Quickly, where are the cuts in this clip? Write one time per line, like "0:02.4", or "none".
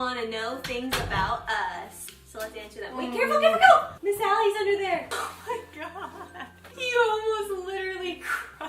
0:03.9
0:06.6